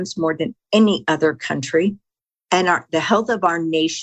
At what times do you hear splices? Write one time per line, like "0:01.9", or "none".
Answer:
0:02.8